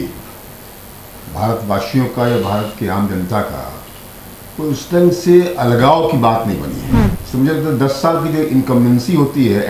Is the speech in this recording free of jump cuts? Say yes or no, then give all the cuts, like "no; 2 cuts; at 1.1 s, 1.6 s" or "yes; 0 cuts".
no; 1 cut; at 7.1 s